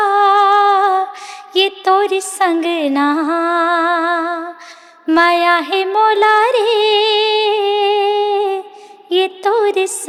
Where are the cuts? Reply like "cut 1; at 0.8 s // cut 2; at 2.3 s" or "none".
none